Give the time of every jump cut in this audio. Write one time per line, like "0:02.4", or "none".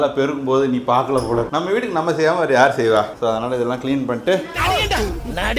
none